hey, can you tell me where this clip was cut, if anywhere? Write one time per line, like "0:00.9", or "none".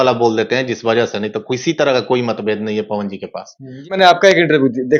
0:03.9